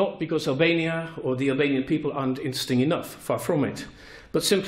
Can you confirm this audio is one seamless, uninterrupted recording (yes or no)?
no